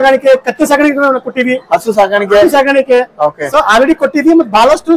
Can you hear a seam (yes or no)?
no